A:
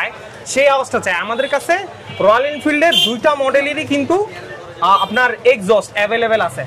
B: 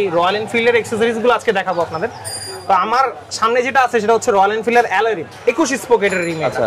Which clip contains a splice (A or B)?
B